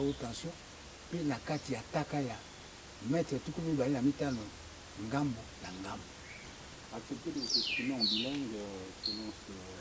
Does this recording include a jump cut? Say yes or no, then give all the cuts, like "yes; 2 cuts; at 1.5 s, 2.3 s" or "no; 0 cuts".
no; 0 cuts